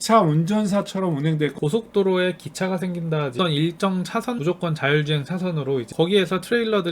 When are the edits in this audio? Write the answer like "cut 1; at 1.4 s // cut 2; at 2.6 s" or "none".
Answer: cut 1; at 1.5 s // cut 2; at 3.3 s // cut 3; at 4.4 s // cut 4; at 5.9 s